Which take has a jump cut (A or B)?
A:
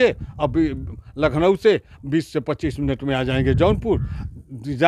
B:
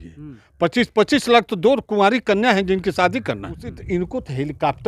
B